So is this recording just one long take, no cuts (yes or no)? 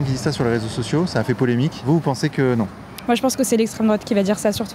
no